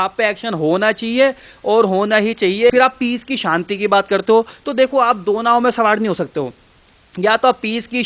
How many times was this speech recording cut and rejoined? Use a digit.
1